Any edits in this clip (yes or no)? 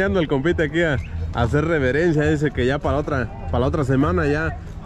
no